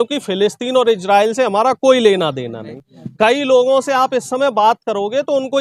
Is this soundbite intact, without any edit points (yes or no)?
no